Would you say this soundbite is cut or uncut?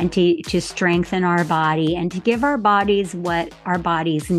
uncut